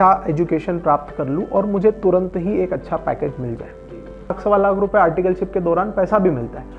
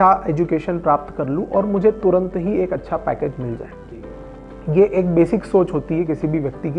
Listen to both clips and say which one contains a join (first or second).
first